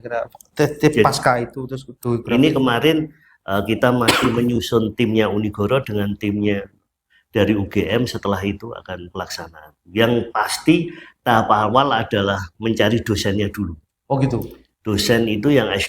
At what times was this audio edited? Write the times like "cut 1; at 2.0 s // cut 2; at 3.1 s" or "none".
none